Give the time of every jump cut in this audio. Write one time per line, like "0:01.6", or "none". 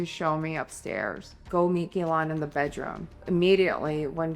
0:01.4
0:03.2